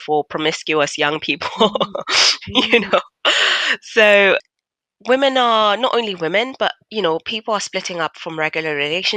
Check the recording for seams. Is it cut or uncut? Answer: cut